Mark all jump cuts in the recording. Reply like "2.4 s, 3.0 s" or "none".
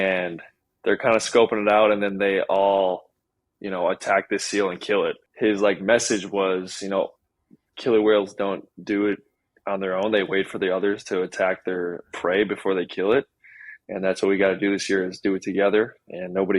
5.2 s